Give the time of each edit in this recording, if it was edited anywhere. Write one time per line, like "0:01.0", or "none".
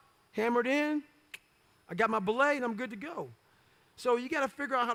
none